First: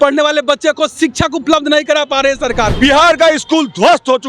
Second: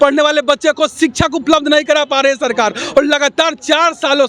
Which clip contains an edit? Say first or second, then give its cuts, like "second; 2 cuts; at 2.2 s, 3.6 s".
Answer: first; 1 cut; at 2.7 s